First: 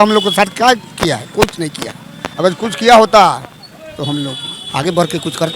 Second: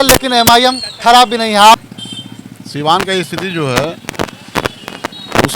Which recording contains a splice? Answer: second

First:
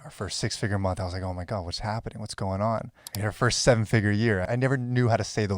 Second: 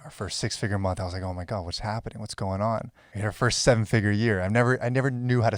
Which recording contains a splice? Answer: first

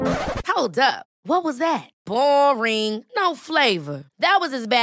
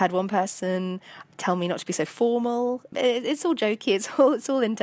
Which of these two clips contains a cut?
second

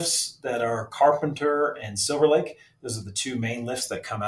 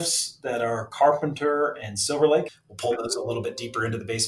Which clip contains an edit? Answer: second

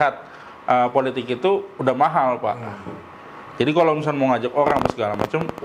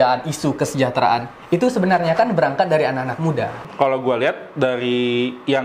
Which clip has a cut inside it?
second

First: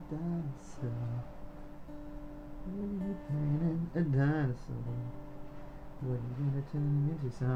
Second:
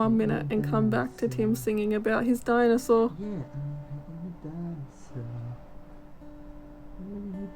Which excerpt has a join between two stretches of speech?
second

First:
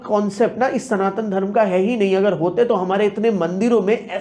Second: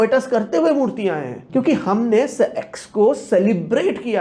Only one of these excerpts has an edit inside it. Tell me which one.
second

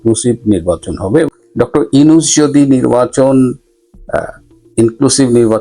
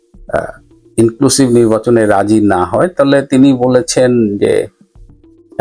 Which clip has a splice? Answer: first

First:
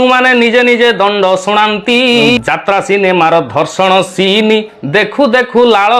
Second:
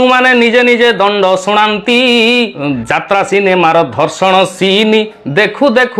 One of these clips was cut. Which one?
first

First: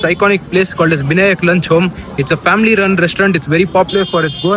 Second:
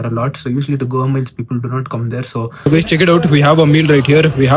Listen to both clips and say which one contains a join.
second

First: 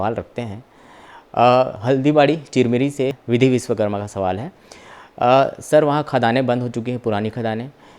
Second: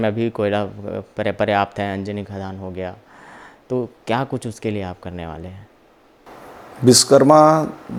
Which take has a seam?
first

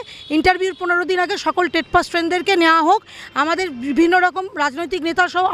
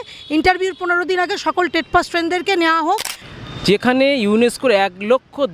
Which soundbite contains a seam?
second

